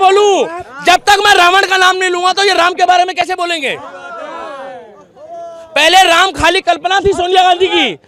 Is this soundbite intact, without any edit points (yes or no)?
yes